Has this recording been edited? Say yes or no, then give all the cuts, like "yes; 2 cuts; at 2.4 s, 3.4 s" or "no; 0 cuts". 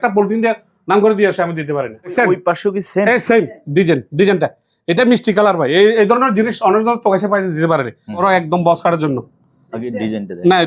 yes; 2 cuts; at 2.1 s, 8.2 s